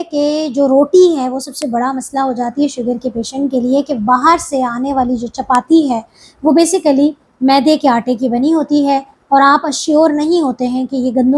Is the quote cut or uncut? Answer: uncut